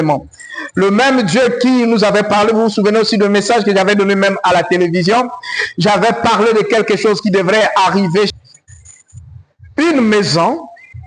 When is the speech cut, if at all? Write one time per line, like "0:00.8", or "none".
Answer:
0:08.3